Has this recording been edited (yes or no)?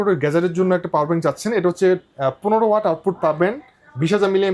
no